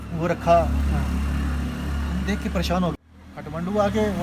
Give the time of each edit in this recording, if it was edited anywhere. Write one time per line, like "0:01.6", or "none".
0:02.9